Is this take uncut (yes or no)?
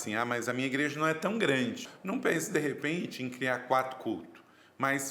no